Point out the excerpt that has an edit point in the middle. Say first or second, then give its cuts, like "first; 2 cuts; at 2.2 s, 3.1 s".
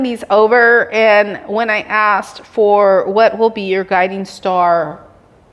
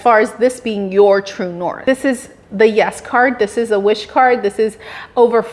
second; 1 cut; at 1.8 s